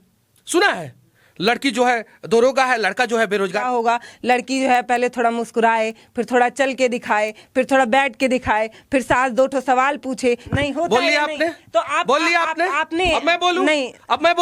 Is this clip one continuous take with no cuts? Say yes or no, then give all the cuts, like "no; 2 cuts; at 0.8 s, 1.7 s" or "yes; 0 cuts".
no; 2 cuts; at 3.6 s, 10.5 s